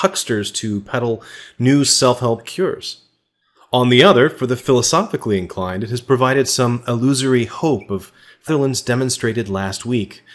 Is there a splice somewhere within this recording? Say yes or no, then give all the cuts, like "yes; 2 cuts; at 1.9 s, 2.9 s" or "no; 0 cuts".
no; 0 cuts